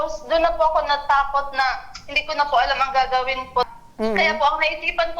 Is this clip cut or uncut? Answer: cut